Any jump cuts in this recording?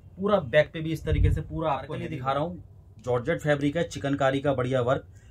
yes; 1 cut; at 1.9 s

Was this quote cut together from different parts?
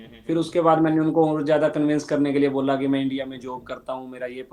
no; 0 cuts

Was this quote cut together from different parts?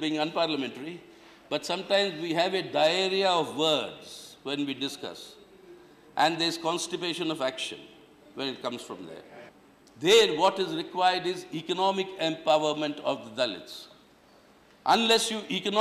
yes; 1 cut; at 9.4 s

